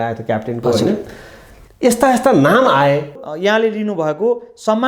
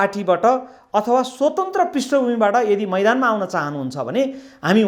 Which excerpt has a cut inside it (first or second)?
first